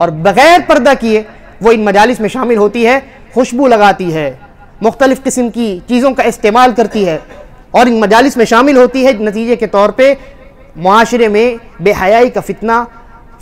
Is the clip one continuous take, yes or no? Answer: yes